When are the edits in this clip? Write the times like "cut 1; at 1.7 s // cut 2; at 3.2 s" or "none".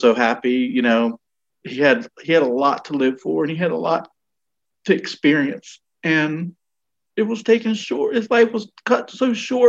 none